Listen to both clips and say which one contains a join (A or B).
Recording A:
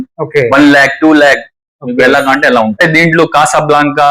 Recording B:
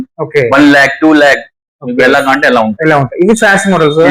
A